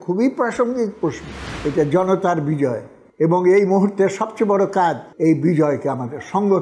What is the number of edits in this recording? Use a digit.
2